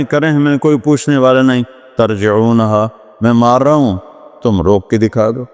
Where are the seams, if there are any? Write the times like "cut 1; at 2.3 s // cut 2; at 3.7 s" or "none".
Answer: none